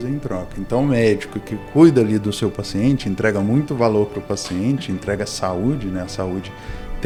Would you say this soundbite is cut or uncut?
uncut